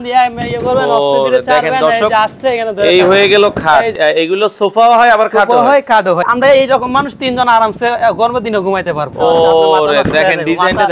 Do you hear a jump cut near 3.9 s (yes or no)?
yes